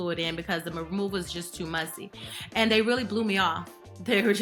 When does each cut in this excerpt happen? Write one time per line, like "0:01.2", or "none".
none